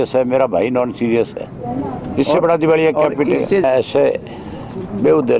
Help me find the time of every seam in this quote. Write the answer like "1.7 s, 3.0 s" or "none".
3.7 s

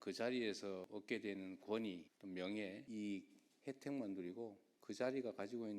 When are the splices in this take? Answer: 0.9 s, 2.1 s, 2.8 s, 4.7 s

